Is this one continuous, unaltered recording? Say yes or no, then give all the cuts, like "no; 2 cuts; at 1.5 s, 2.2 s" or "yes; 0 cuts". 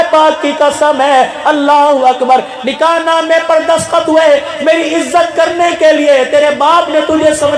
yes; 0 cuts